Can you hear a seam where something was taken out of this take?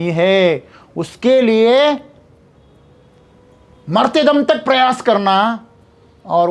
no; 0 cuts

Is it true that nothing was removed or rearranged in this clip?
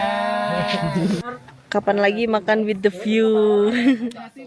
no; 1 cut; at 1.2 s

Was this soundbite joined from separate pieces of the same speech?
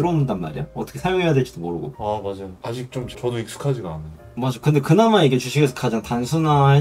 no; 0 cuts

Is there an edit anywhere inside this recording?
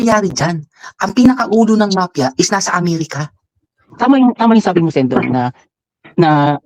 yes; 1 cut; at 3.9 s

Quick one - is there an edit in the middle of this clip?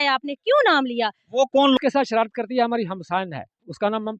yes; 1 cut; at 1.8 s

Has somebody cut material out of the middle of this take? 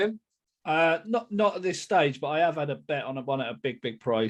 no; 0 cuts

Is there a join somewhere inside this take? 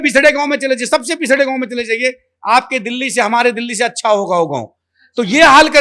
no; 0 cuts

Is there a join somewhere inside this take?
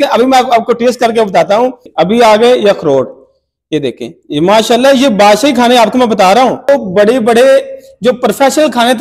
yes; 2 cuts; at 1.8 s, 6.7 s

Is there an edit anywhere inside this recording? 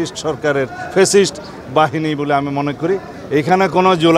yes; 1 cut; at 3.1 s

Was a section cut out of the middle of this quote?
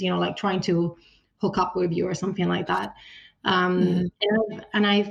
no; 0 cuts

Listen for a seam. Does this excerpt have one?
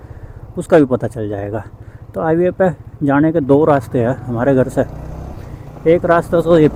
no; 0 cuts

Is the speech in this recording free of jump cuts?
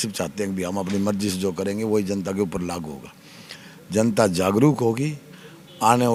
yes; 0 cuts

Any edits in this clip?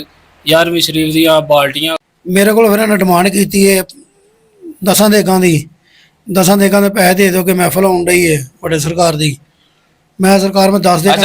yes; 1 cut; at 1.8 s

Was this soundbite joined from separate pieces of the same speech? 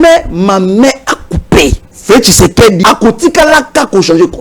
yes; 2 cuts; at 1.9 s, 2.8 s

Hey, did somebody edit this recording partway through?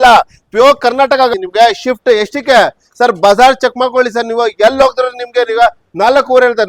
yes; 1 cut; at 1.3 s

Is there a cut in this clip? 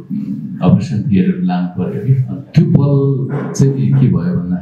yes; 2 cuts; at 2.3 s, 3.4 s

